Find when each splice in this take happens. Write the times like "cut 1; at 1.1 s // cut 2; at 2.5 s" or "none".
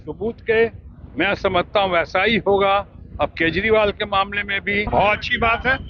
cut 1; at 4.9 s